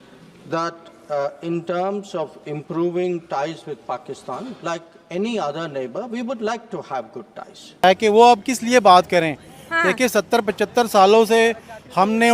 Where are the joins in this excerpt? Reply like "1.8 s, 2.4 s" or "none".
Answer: 7.8 s